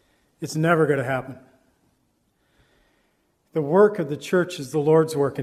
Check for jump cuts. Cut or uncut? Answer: uncut